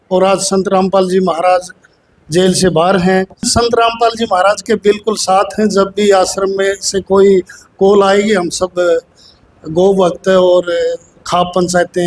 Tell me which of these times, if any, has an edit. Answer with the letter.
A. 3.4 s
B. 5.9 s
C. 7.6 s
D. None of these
A